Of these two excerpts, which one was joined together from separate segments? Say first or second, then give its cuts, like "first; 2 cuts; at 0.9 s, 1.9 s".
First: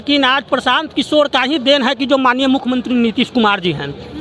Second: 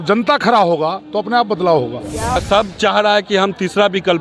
second; 1 cut; at 2.4 s